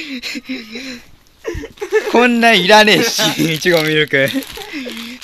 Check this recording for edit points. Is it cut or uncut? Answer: uncut